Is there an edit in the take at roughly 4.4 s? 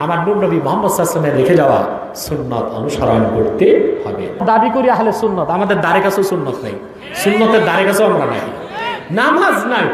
yes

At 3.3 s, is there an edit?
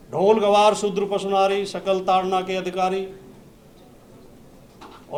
no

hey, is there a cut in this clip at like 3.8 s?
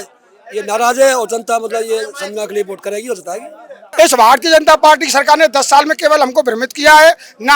yes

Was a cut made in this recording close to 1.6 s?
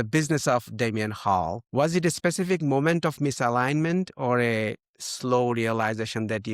yes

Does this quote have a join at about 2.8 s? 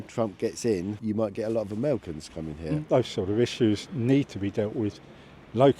yes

